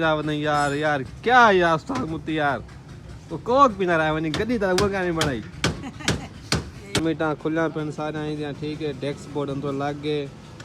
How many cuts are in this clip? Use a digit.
1